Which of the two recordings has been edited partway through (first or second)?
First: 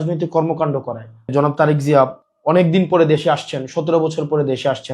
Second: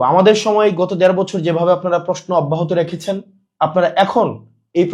first